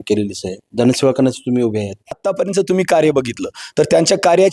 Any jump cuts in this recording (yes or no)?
yes